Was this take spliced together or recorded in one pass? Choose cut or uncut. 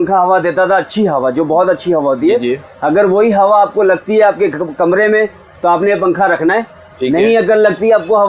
uncut